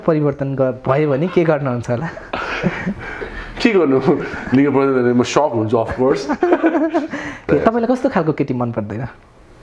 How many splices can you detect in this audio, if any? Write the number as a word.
one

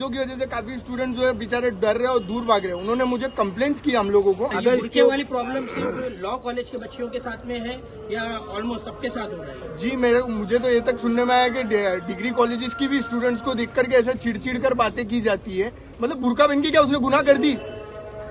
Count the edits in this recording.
zero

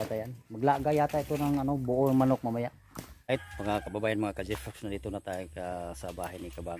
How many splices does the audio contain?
one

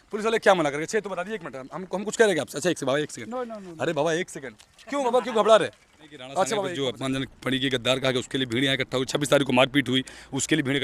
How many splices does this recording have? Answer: one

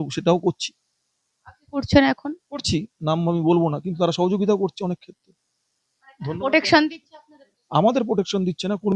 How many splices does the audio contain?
zero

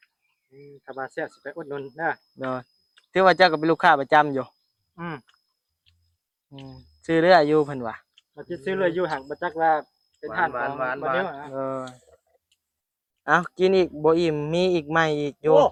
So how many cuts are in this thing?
zero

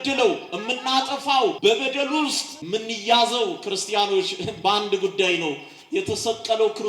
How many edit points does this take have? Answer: two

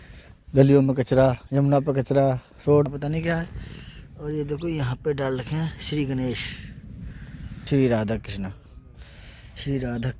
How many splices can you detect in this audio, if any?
two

